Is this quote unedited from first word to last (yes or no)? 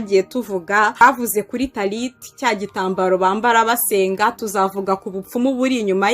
no